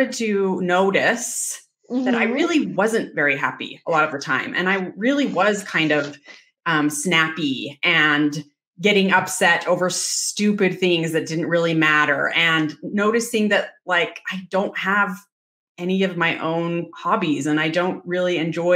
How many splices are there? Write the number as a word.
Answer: zero